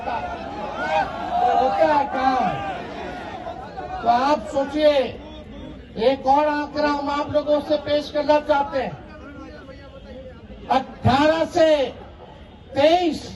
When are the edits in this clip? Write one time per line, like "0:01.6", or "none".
none